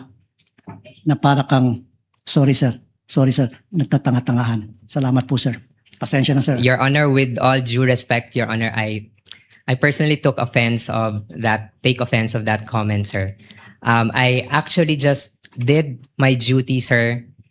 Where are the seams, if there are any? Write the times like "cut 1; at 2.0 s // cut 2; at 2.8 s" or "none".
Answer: none

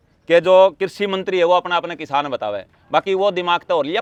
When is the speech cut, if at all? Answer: none

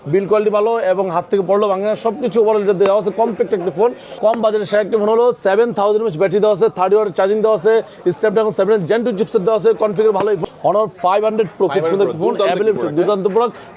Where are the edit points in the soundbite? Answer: cut 1; at 4.2 s // cut 2; at 10.4 s

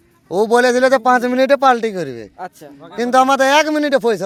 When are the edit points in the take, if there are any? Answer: none

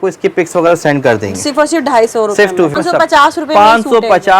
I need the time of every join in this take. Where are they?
cut 1; at 2.7 s

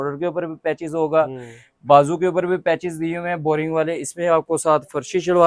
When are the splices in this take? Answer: none

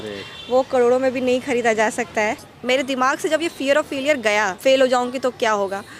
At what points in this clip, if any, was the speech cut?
cut 1; at 2.5 s // cut 2; at 4.5 s

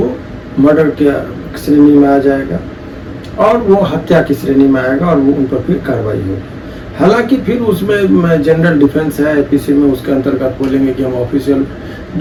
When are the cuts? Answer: none

